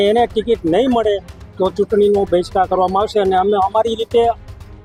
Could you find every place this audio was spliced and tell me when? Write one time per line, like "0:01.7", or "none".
none